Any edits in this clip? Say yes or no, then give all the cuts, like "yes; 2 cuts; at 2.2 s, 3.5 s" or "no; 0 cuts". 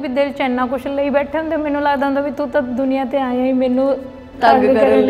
no; 0 cuts